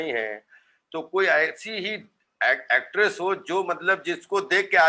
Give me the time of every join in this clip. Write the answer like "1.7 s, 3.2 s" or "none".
none